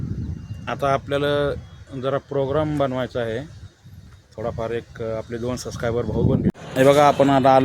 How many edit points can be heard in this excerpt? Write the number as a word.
one